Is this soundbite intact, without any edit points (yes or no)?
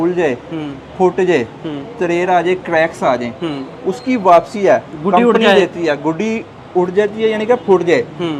yes